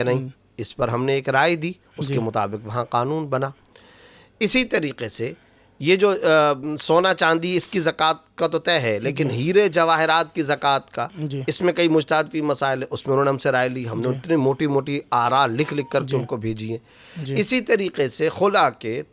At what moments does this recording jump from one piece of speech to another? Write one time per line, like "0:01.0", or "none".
none